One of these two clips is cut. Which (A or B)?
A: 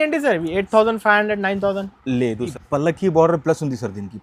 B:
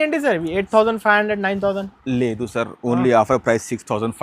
A